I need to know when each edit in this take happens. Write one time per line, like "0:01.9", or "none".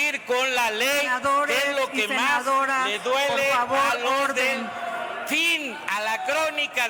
none